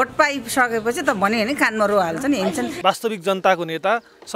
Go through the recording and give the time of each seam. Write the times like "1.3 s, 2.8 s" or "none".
2.7 s